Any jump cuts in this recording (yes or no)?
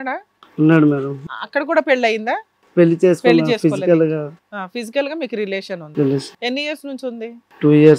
yes